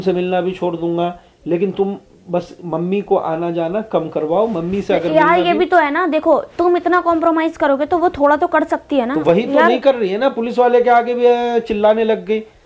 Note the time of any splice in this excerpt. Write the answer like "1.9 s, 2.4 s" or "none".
none